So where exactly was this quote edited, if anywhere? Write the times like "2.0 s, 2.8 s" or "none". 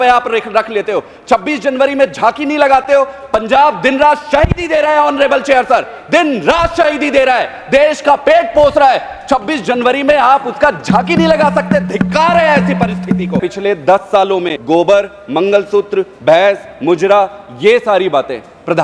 13.4 s, 14.5 s